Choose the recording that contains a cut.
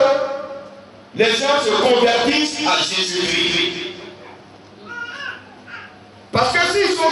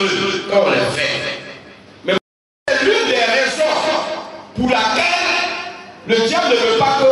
second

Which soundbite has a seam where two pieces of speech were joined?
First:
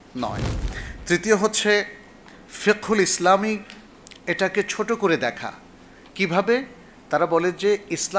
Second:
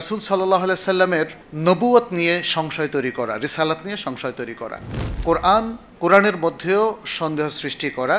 second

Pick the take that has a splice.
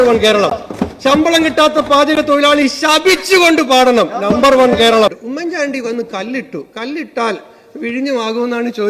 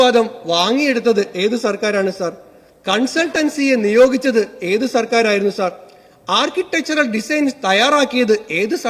first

